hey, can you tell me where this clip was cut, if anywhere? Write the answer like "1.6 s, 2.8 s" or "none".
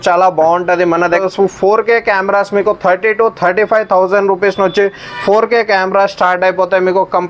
1.2 s